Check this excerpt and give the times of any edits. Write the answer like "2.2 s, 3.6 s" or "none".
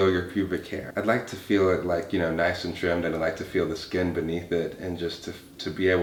none

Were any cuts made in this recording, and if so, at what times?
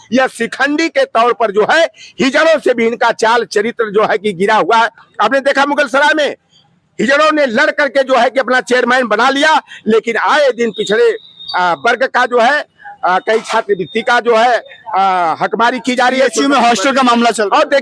none

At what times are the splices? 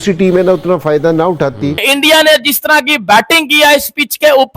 1.9 s

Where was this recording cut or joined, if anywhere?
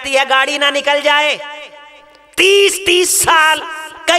none

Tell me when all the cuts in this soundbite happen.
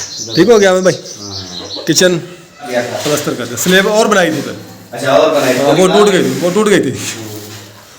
2.7 s

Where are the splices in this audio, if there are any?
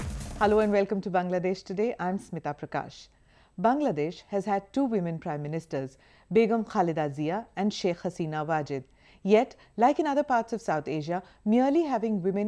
10.1 s

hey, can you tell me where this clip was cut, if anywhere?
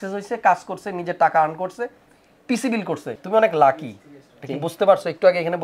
3.1 s

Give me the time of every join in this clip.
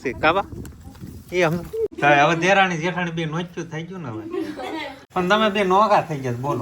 1.9 s, 5.0 s

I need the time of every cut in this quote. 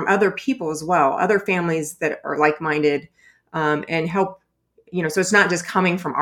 none

